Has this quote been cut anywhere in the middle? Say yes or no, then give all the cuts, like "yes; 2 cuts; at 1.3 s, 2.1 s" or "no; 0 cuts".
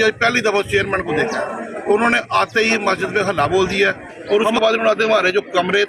yes; 1 cut; at 4.1 s